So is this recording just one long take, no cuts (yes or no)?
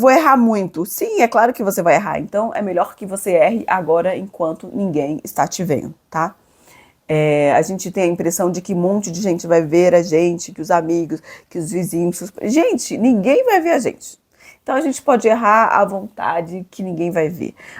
yes